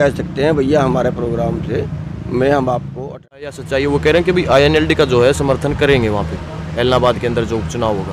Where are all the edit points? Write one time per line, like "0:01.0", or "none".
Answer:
0:03.6